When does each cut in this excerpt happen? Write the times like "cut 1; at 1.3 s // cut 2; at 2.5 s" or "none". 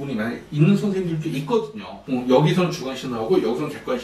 cut 1; at 1.9 s